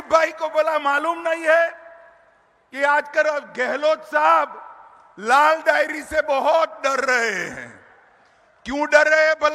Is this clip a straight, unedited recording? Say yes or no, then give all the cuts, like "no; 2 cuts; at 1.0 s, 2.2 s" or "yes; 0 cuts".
yes; 0 cuts